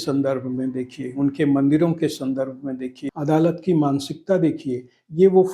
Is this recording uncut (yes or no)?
no